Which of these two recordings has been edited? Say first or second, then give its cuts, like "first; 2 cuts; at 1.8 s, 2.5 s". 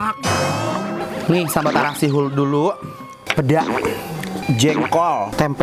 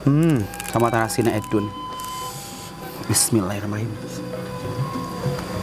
first; 1 cut; at 1.1 s